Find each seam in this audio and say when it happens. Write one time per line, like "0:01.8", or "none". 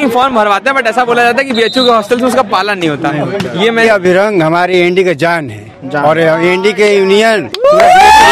0:03.8